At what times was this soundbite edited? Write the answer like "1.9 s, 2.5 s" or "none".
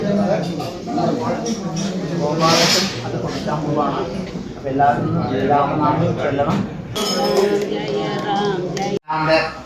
7.0 s, 9.0 s